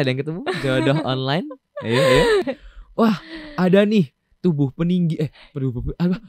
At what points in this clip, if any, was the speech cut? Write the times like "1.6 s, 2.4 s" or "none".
2.5 s